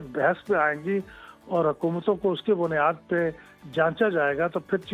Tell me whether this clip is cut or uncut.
uncut